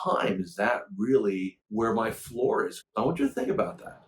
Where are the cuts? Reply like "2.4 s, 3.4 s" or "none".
1.6 s, 2.8 s